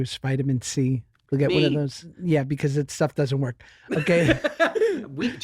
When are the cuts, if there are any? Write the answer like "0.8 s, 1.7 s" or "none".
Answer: 2.1 s